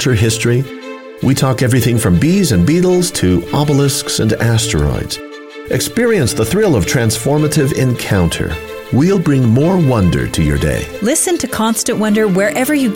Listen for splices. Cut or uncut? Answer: uncut